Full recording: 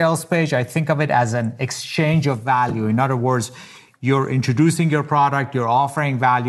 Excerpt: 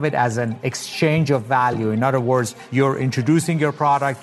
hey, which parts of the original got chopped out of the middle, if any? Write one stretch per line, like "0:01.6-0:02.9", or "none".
0:03.5-0:03.9